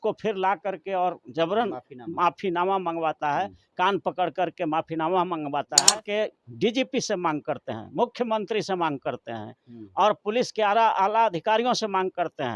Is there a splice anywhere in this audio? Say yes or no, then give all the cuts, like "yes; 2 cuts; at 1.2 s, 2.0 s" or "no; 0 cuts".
yes; 1 cut; at 5.9 s